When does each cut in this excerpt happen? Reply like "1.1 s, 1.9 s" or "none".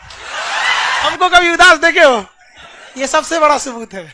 1.1 s

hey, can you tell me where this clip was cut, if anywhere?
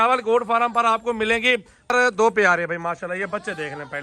1.9 s

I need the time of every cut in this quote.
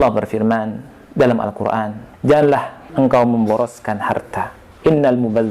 2.0 s, 2.8 s, 4.6 s

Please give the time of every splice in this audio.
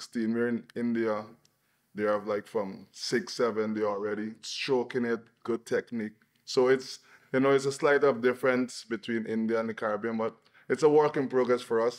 none

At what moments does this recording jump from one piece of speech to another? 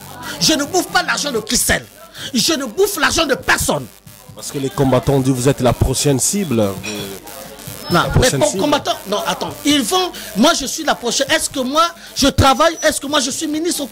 none

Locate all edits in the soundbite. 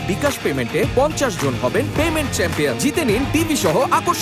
none

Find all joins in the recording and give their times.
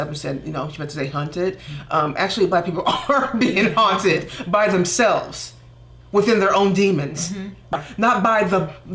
7.8 s

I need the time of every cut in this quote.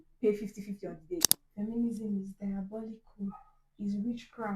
1.4 s

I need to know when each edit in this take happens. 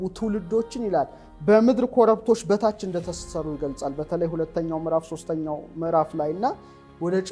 none

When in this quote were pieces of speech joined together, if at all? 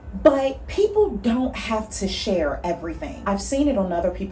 3.2 s

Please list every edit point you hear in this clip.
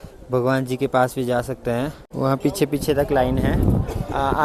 2.0 s

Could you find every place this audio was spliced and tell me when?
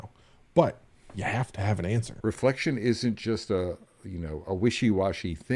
2.2 s

